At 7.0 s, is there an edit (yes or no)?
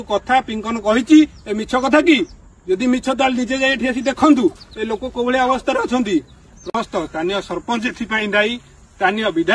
yes